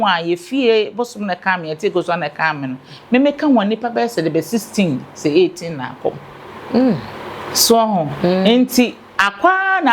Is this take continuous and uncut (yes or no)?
yes